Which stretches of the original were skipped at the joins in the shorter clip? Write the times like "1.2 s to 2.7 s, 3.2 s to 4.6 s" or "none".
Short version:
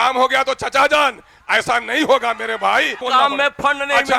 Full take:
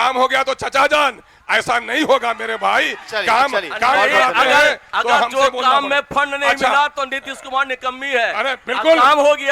3.0 s to 5.6 s